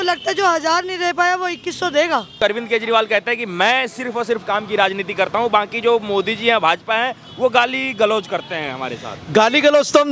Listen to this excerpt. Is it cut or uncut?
cut